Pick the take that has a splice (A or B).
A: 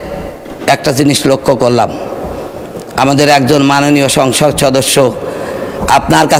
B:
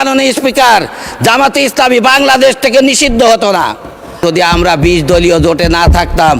B